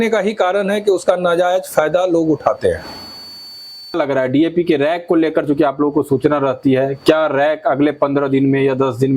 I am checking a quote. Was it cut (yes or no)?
yes